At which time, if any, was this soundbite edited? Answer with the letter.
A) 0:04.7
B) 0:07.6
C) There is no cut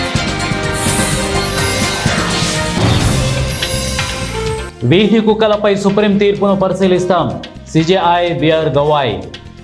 C